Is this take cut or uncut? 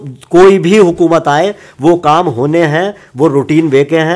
uncut